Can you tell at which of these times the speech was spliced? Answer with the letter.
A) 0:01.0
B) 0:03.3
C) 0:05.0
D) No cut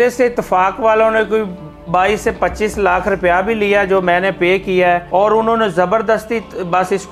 C